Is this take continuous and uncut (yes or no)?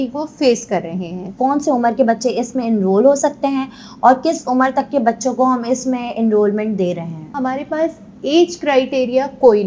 no